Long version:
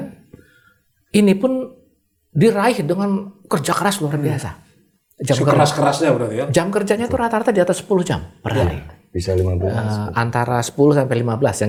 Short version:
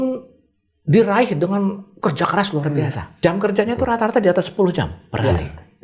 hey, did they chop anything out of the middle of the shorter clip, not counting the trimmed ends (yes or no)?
yes